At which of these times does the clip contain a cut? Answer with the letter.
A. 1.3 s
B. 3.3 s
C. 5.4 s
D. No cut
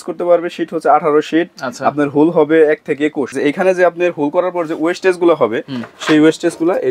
B